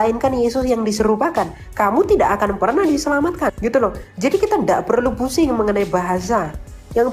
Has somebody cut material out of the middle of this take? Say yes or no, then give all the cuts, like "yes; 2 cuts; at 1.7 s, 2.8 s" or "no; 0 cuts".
no; 0 cuts